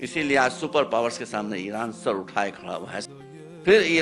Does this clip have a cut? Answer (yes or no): yes